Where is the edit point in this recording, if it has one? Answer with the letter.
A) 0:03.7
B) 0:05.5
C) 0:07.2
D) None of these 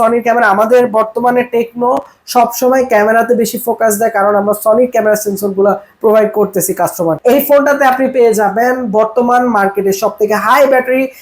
C